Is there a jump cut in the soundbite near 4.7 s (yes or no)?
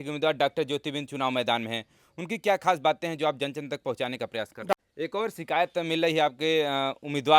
yes